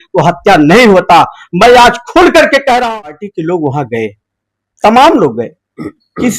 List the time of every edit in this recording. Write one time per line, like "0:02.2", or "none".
0:03.3